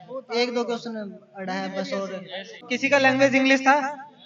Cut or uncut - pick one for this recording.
cut